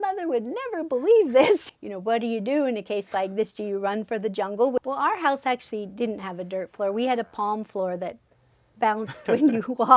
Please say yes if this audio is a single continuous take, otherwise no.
no